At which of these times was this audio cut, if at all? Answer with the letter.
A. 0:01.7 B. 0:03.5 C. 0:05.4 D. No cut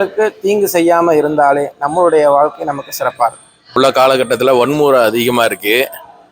B